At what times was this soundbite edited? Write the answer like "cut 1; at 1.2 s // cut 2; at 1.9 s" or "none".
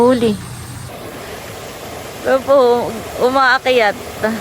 cut 1; at 0.9 s